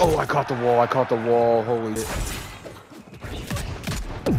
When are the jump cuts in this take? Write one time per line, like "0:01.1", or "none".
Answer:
0:02.0